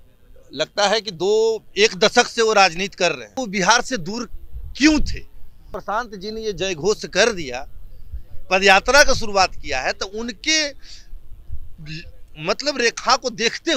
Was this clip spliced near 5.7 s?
yes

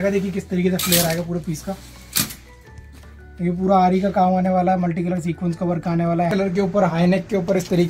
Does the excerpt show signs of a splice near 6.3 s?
yes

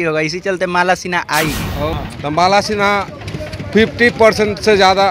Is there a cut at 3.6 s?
no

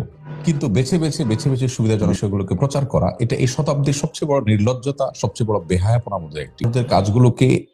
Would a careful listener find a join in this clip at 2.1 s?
yes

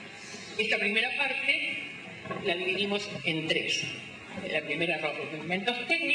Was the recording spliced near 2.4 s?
yes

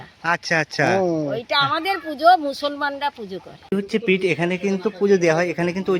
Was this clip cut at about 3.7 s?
yes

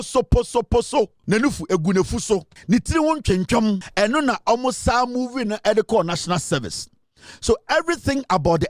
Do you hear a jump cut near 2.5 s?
yes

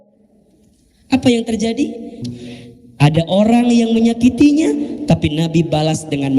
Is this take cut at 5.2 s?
no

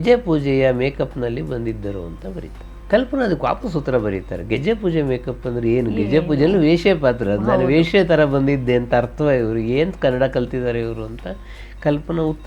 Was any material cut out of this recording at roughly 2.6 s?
no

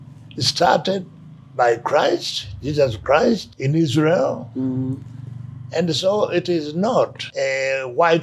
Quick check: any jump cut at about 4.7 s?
no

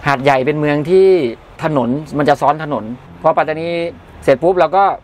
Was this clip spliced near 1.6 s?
yes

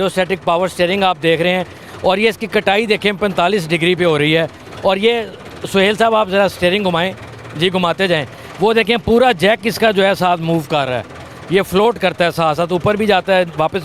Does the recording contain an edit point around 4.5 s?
no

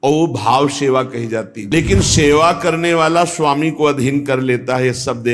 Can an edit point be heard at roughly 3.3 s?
no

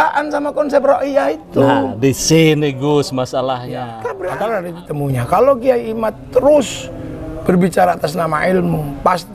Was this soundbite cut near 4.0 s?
yes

